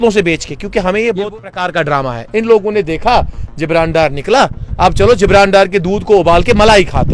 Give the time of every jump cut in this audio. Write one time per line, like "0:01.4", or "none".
0:01.2